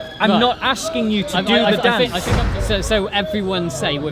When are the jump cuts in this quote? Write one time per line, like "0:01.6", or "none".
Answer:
0:02.4